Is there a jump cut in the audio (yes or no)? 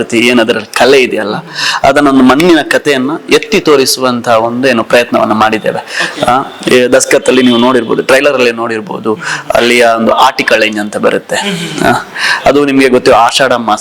no